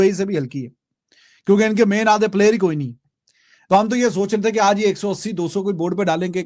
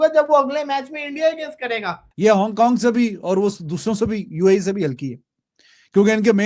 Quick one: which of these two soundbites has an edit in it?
second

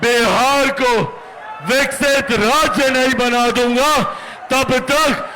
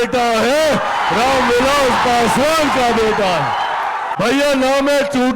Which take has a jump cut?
second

